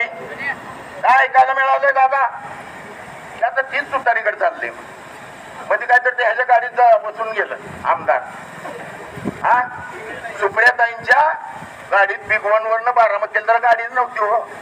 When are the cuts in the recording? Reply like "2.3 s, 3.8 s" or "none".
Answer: none